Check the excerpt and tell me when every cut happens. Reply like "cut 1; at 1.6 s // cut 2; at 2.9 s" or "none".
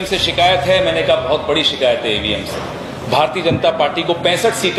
none